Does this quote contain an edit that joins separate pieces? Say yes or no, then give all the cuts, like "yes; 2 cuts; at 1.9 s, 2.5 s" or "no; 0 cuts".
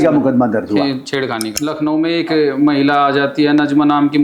yes; 1 cut; at 1.5 s